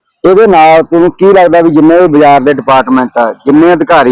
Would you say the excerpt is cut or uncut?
uncut